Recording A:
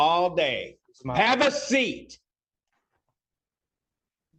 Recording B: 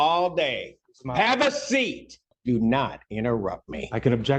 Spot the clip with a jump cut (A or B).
B